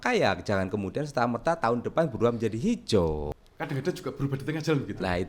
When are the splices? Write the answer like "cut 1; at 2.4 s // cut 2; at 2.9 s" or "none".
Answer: cut 1; at 3.3 s